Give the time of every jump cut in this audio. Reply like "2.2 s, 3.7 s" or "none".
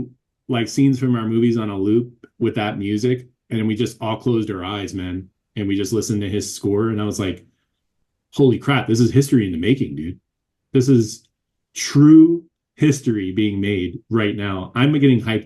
none